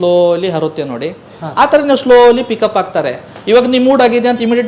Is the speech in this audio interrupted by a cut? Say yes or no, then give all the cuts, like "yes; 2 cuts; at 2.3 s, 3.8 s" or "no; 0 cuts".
no; 0 cuts